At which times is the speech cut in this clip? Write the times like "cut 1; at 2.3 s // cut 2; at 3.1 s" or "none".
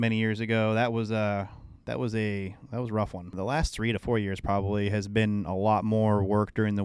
cut 1; at 3.3 s